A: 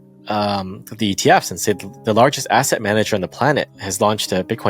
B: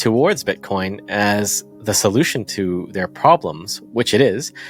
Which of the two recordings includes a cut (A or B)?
A